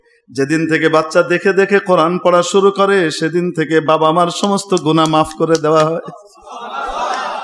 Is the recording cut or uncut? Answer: uncut